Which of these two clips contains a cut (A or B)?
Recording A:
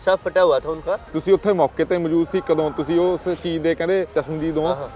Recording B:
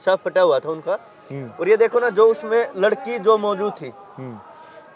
A